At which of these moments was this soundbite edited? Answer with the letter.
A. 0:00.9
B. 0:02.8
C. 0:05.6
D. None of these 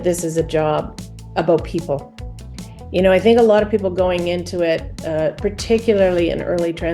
A